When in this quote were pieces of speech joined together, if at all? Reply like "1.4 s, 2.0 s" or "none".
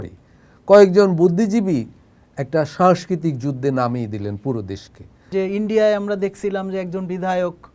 5.3 s